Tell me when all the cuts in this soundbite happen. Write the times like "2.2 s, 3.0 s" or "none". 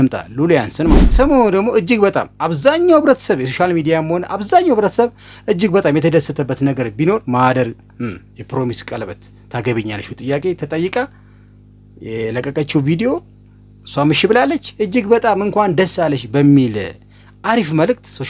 1.0 s